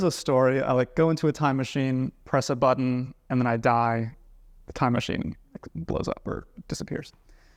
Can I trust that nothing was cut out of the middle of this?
yes; 0 cuts

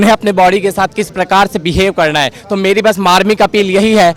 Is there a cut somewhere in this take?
no; 0 cuts

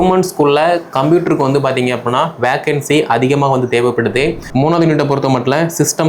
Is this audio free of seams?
no; 1 cut; at 4.4 s

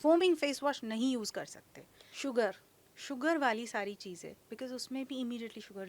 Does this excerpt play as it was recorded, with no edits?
no; 1 cut; at 1.9 s

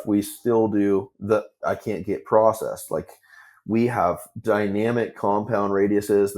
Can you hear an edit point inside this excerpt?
yes; 1 cut; at 1.1 s

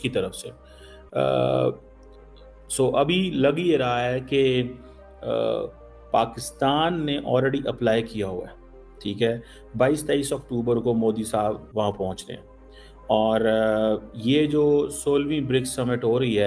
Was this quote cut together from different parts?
no; 0 cuts

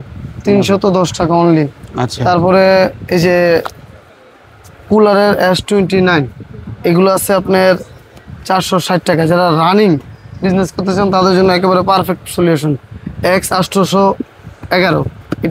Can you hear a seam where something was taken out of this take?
no; 0 cuts

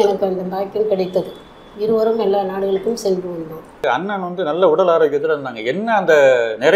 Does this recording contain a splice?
yes; 1 cut; at 3.9 s

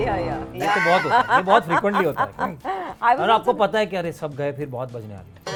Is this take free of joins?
yes; 0 cuts

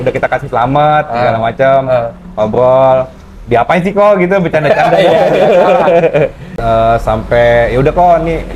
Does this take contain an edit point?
yes; 1 cut; at 6.6 s

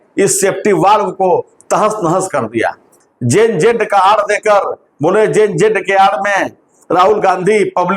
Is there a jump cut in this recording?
yes; 1 cut; at 2.8 s

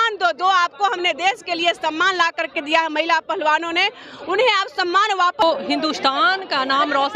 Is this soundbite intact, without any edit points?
no; 1 cut; at 5.4 s

